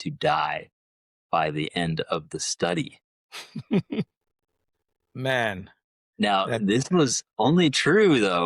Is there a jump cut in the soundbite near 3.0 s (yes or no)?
no